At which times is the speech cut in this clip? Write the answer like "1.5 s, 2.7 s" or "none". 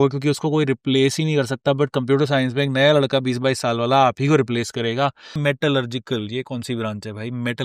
5.4 s

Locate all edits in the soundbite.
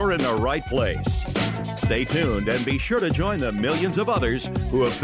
none

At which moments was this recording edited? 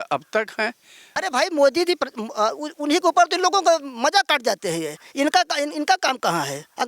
1.1 s

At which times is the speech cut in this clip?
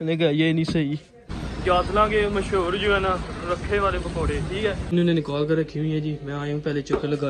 1.3 s, 4.9 s

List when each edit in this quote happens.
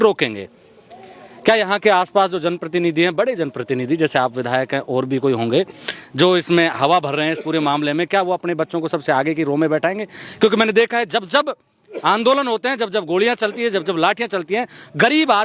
none

